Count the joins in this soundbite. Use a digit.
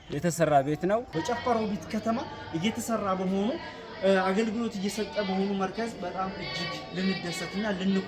1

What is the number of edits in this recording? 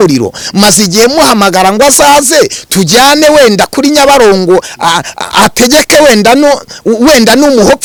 0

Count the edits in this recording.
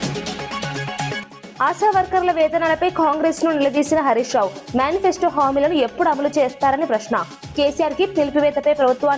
1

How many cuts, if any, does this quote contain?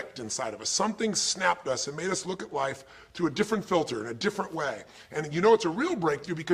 1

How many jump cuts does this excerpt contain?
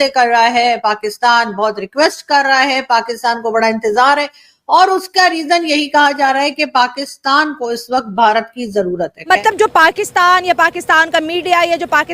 1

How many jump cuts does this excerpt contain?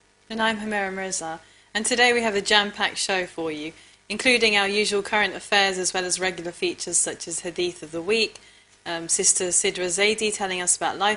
1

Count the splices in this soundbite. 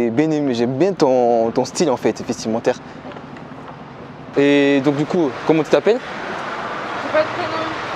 1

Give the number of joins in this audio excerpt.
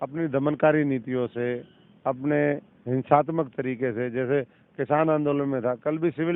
0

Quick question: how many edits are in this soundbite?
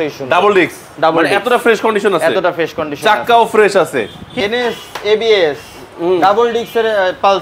1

